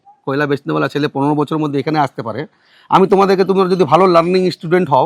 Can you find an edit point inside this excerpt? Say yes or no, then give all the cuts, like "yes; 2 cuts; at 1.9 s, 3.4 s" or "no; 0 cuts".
no; 0 cuts